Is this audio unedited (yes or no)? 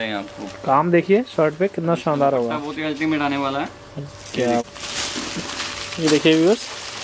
no